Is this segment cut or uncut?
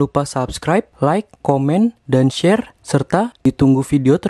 uncut